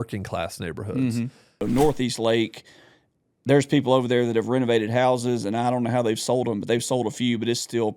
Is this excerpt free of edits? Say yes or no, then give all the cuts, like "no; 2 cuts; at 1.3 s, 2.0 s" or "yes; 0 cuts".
no; 1 cut; at 1.6 s